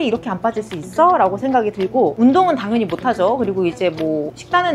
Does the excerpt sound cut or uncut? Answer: cut